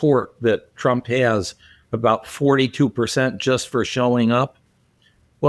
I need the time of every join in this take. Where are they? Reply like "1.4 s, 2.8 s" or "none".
none